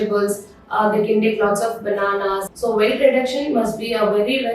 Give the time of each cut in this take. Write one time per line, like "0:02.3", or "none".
0:02.4